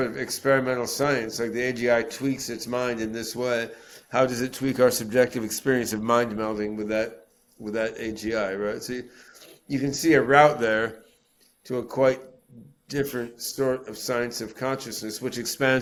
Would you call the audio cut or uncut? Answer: uncut